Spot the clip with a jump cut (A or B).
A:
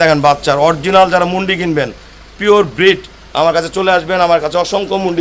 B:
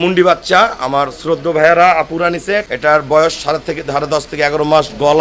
B